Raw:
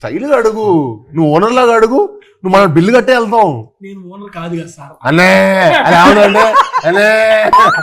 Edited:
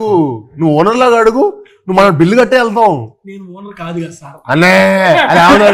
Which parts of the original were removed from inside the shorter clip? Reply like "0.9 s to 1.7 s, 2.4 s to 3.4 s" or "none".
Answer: none